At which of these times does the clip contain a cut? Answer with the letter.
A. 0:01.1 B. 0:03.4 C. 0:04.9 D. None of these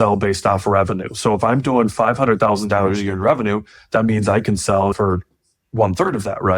C